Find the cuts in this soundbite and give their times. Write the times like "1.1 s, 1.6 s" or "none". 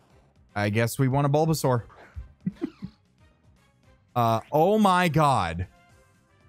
none